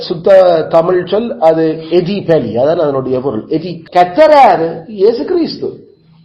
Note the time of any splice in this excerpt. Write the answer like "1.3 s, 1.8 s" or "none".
3.8 s